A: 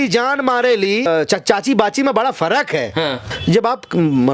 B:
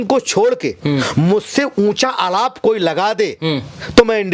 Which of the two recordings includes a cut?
A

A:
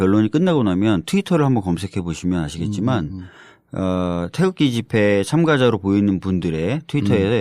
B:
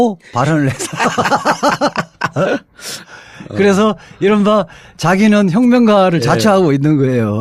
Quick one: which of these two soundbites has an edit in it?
B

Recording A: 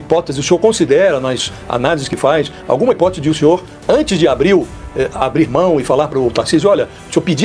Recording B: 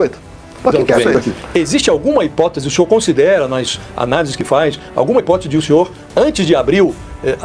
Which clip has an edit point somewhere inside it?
B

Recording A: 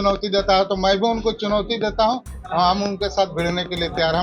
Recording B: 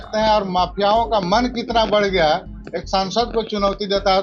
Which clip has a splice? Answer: A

